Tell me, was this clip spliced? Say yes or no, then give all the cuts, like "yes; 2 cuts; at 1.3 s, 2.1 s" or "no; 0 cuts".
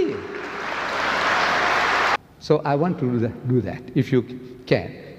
yes; 1 cut; at 2.2 s